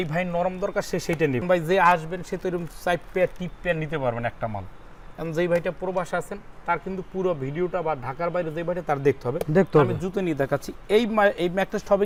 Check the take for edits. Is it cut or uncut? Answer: uncut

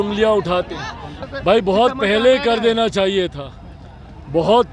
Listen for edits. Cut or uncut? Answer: cut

